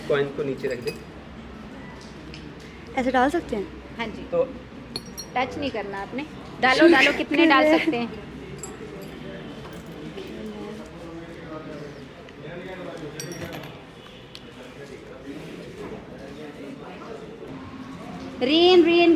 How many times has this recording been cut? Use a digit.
1